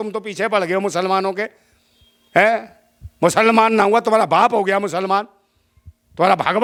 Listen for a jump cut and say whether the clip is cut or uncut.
uncut